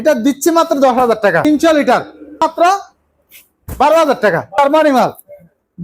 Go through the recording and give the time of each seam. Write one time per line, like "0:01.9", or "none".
0:01.4
0:02.4
0:04.6